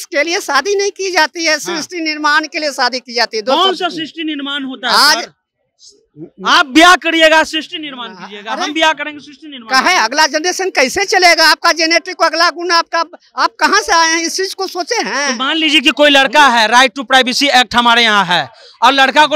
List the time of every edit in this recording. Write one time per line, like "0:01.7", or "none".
none